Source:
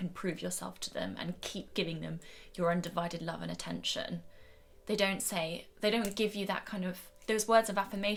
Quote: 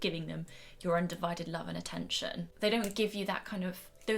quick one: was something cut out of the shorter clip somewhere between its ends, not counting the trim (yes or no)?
yes